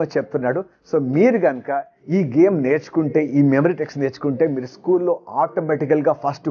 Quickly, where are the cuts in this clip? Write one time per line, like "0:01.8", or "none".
none